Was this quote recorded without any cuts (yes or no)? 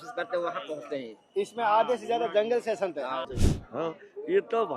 no